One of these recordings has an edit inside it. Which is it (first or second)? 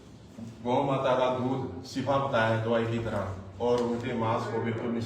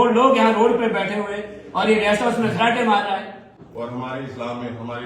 second